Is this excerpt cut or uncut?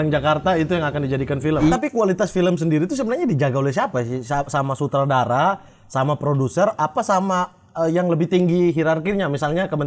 cut